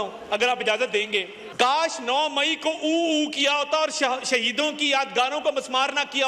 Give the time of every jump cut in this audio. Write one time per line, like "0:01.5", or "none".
0:01.4